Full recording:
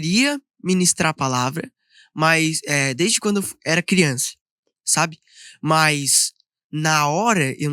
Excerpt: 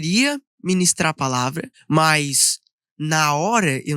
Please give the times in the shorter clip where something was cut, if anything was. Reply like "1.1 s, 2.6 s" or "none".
1.7 s

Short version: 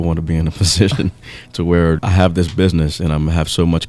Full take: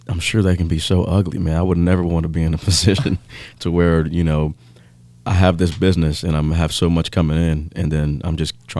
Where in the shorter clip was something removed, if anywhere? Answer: 2.0 s

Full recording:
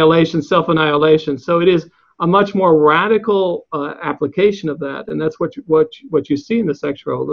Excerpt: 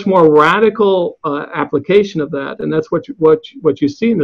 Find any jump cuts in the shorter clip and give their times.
none

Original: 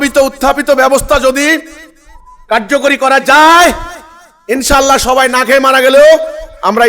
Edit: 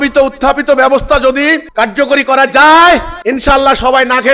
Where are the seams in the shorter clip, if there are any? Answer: 1.7 s, 3.1 s

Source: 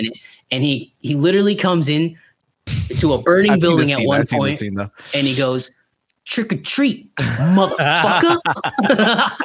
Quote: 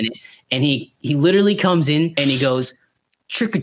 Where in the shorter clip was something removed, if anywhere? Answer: 2.1 s

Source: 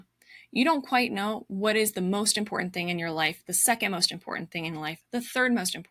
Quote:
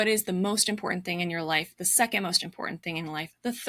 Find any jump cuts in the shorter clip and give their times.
none

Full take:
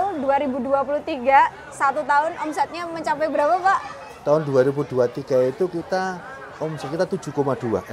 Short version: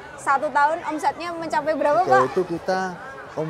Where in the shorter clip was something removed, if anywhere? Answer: 2.2 s

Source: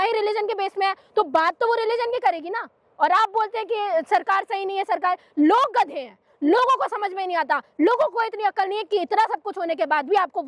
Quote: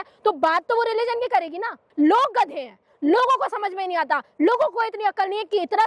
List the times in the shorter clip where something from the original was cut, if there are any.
1.9 s

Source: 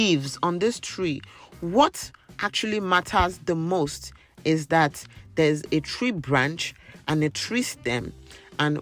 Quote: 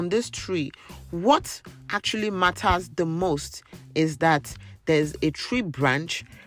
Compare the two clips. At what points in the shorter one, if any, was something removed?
none

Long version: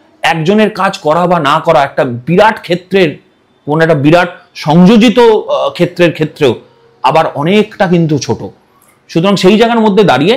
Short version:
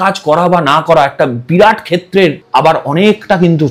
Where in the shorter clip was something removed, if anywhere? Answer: 2.4 s

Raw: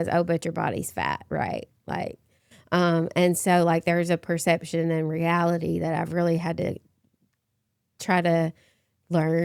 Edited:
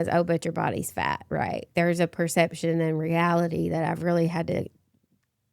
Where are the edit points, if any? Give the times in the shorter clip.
1.7 s

